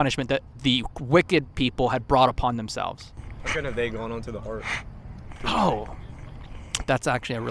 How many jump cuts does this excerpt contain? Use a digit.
0